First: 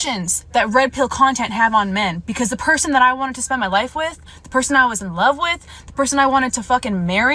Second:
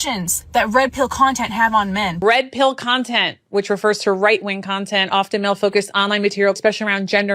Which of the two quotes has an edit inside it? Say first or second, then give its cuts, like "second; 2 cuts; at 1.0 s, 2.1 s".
second; 2 cuts; at 2.2 s, 6.6 s